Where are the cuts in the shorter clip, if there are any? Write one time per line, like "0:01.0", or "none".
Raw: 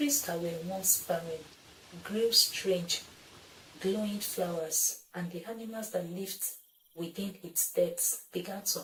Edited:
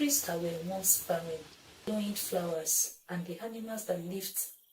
0:01.9